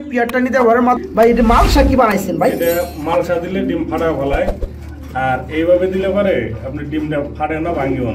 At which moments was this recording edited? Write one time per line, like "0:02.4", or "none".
0:01.0